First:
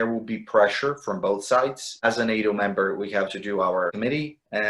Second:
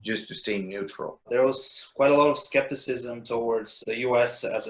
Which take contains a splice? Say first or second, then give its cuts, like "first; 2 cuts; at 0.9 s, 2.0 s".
second; 1 cut; at 1.1 s